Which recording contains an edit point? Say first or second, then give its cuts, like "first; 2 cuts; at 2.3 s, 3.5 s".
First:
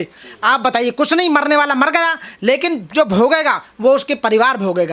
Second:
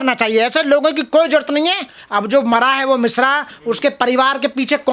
second; 1 cut; at 1.9 s